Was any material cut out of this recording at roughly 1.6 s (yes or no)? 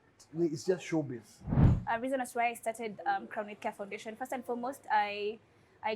yes